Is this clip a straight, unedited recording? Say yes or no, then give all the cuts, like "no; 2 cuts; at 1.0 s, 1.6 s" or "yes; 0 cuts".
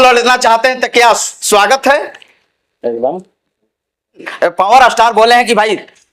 no; 1 cut; at 4.3 s